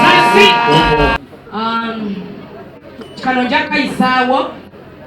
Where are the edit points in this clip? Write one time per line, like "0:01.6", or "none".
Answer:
0:01.2